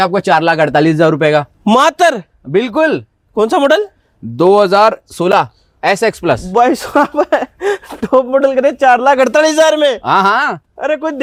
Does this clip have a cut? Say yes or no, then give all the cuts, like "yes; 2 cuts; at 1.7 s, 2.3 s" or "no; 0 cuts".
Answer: no; 0 cuts